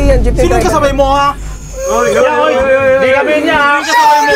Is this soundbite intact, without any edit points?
yes; 0 cuts

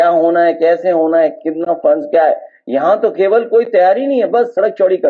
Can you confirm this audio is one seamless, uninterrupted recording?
yes; 0 cuts

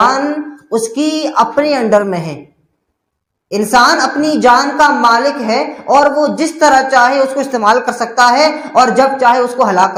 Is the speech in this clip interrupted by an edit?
no; 0 cuts

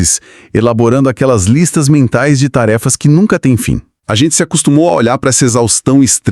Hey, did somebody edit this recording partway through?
yes; 1 cut; at 4.0 s

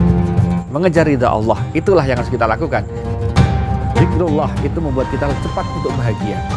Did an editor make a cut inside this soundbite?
no; 0 cuts

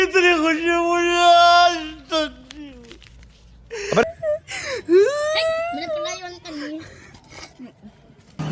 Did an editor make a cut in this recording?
no; 0 cuts

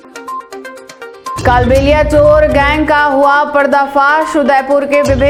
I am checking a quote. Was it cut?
no; 0 cuts

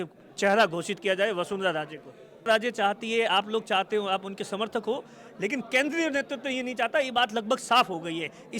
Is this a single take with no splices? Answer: no; 1 cut; at 2.5 s

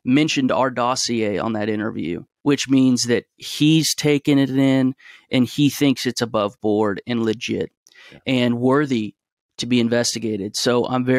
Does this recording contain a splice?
yes; 1 cut; at 2.3 s

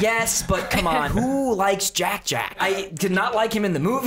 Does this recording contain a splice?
yes; 2 cuts; at 1.1 s, 2.5 s

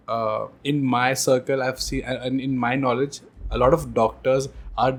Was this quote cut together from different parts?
no; 0 cuts

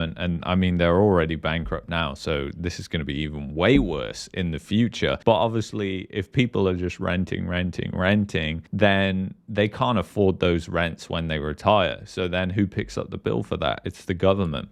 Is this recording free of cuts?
yes; 0 cuts

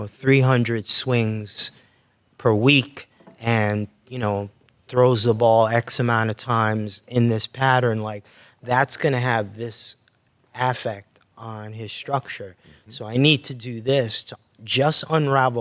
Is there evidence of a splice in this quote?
no; 0 cuts

